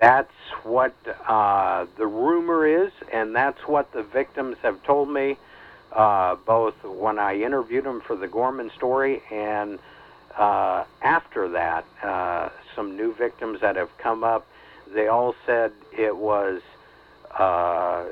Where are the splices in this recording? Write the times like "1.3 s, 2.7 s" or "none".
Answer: none

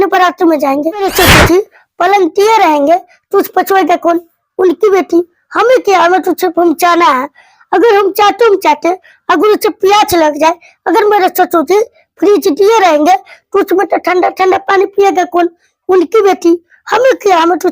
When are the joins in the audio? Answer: 1.1 s

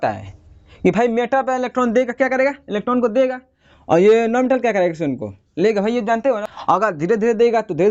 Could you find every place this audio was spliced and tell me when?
6.5 s

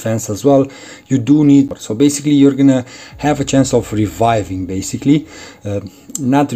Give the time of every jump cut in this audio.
1.7 s

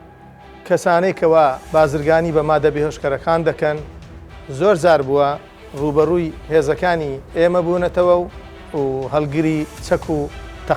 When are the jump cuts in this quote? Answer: 8.6 s, 9.8 s

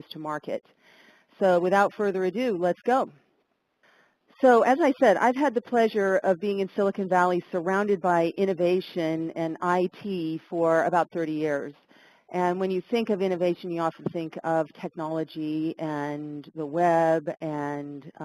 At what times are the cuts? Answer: 6.7 s

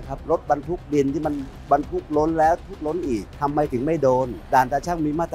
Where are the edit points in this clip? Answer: 3.3 s, 4.4 s

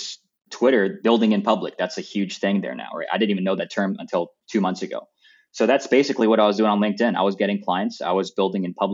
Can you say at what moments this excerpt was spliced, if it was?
1.0 s

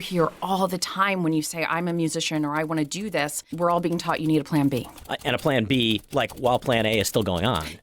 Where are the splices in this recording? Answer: 3.5 s

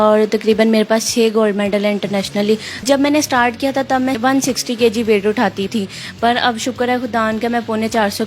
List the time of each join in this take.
2.8 s, 4.2 s, 5.7 s

